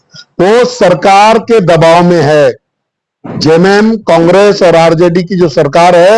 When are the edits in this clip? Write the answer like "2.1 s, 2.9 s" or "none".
none